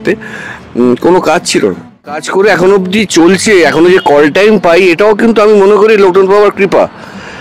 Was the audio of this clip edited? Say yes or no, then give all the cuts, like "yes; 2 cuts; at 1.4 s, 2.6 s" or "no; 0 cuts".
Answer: yes; 1 cut; at 2.2 s